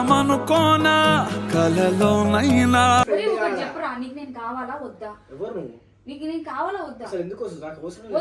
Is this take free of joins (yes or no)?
no